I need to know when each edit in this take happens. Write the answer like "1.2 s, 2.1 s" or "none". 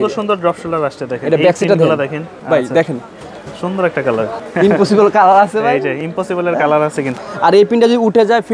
2.3 s, 4.4 s, 7.1 s